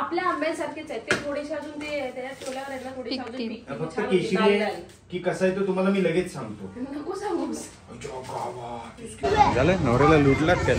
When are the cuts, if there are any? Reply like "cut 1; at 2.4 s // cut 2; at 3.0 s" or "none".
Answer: cut 1; at 9.2 s